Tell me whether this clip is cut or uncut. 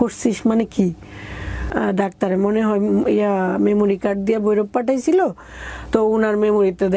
cut